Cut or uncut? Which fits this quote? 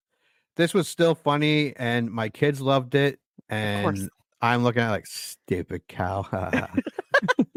uncut